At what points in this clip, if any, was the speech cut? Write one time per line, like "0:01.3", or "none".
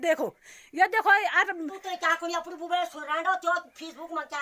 0:01.8